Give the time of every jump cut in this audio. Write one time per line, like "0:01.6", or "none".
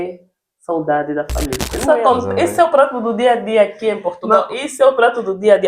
0:01.7